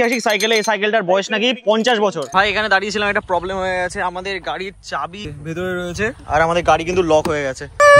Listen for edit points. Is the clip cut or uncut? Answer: cut